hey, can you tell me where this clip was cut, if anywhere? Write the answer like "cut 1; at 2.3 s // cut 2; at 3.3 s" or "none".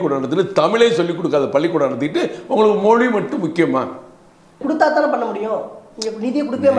cut 1; at 4.6 s